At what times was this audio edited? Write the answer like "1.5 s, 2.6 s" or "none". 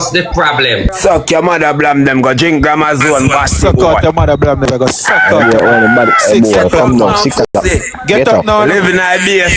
0.9 s, 4.7 s